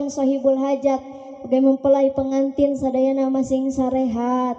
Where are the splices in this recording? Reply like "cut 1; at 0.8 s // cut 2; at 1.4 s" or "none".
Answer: none